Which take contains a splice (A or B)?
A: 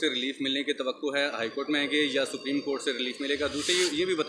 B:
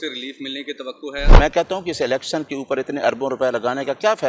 B